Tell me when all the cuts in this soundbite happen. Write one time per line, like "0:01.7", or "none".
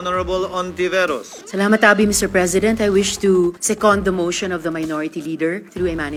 none